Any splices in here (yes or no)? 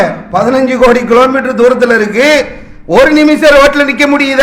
no